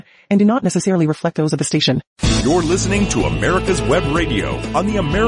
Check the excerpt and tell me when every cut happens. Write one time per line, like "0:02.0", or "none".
0:02.1